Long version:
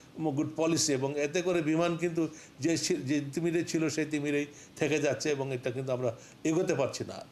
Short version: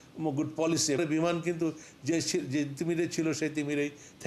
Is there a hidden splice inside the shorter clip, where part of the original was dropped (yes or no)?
yes